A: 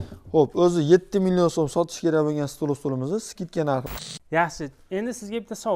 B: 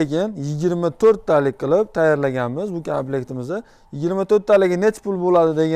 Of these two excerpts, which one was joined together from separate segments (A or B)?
A